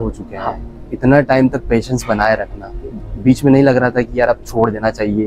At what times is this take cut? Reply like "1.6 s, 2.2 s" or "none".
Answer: 0.9 s